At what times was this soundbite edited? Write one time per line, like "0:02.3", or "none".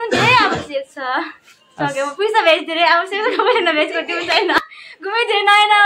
0:04.6